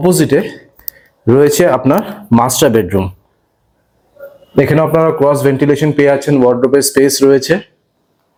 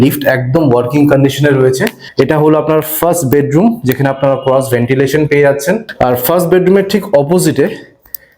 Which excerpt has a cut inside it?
second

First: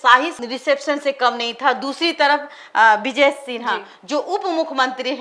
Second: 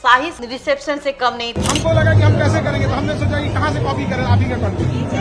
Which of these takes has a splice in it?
second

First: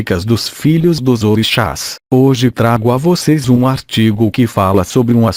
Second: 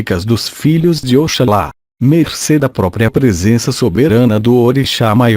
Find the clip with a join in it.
second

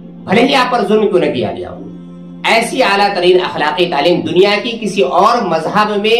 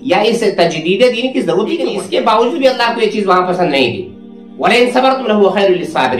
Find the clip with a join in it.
second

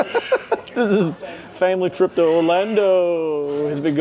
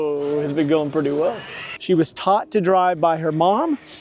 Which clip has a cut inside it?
second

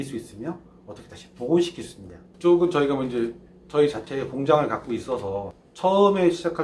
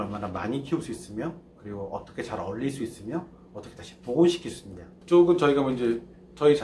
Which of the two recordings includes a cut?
first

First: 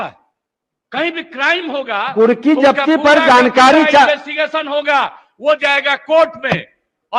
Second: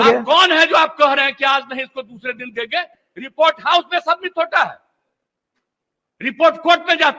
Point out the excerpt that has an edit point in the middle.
second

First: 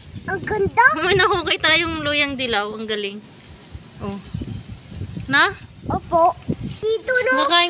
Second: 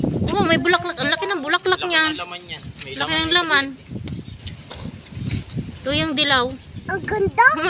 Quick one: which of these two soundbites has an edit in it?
first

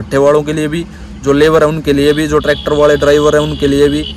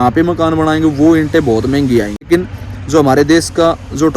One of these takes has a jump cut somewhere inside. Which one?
second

